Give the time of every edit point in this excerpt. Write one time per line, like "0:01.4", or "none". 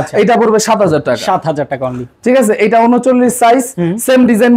none